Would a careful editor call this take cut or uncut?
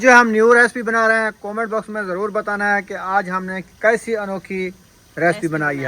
uncut